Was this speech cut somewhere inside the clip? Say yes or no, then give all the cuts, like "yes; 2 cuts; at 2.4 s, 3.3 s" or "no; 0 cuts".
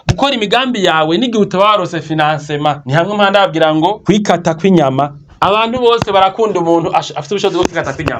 yes; 3 cuts; at 2.8 s, 4.0 s, 5.2 s